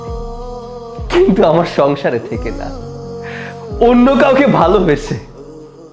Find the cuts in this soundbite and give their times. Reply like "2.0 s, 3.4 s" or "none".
1.1 s, 2.3 s, 3.8 s, 5.1 s